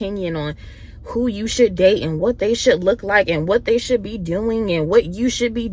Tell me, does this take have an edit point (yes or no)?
no